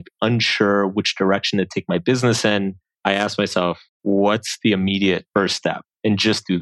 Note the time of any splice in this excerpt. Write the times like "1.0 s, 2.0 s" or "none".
2.9 s, 3.9 s, 5.2 s